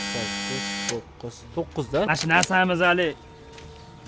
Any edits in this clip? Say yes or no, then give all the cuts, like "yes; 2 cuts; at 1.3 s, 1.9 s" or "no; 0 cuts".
yes; 1 cut; at 2.1 s